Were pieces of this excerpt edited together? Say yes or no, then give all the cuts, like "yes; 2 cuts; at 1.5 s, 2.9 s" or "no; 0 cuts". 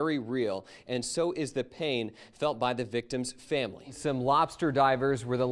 yes; 1 cut; at 4.0 s